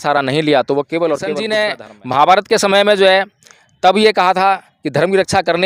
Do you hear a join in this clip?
yes; 1 cut; at 1.4 s

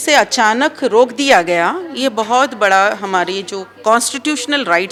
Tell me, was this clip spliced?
no; 0 cuts

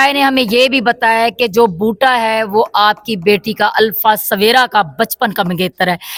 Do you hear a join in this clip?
no; 0 cuts

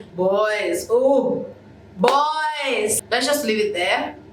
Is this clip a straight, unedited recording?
no; 1 cut; at 3.0 s

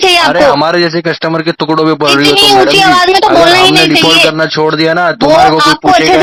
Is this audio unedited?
yes; 0 cuts

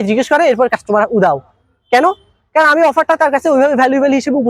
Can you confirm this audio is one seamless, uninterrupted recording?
yes; 0 cuts

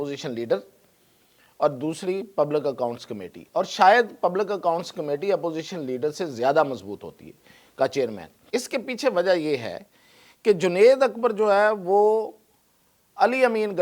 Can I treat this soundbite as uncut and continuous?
no; 1 cut; at 8.3 s

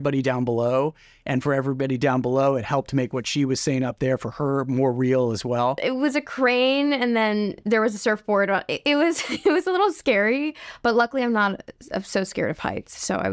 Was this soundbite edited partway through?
yes; 1 cut; at 5.8 s

